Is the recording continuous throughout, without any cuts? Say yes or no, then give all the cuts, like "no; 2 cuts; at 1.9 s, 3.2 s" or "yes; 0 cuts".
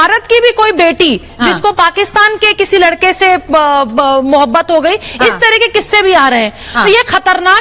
yes; 0 cuts